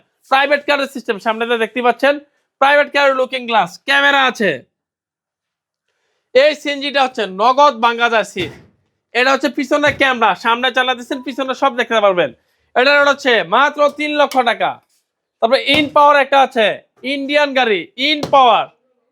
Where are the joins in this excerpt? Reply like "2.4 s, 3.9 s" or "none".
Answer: none